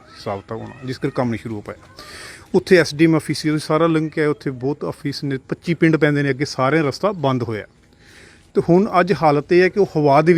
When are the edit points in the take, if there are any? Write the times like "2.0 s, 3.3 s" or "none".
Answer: none